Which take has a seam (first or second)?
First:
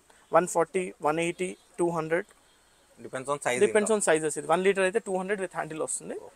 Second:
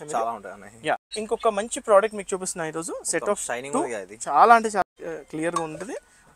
second